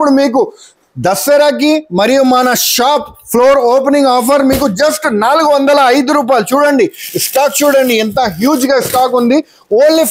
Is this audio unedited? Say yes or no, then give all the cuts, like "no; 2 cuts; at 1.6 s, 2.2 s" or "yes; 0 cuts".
yes; 0 cuts